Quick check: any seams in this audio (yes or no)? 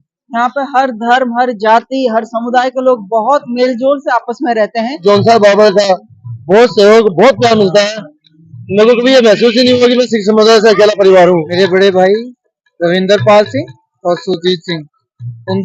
yes